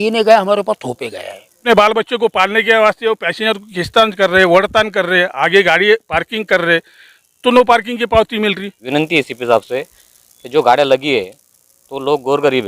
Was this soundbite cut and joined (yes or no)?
yes